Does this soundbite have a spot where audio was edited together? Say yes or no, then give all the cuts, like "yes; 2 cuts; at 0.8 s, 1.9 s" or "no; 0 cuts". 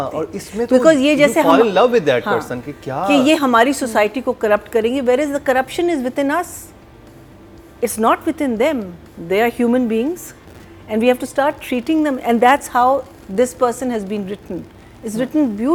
no; 0 cuts